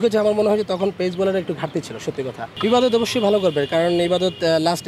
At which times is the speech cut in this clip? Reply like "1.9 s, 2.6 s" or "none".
2.4 s